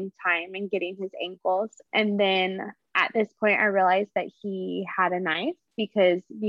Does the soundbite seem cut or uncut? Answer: cut